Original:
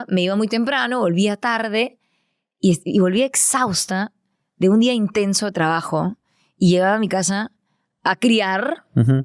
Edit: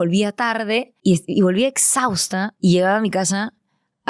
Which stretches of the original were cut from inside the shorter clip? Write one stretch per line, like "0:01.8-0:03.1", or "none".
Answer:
0:02.0-0:02.5
0:04.1-0:06.5